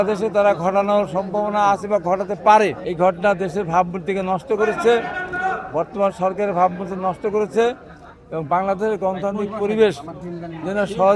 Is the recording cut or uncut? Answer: cut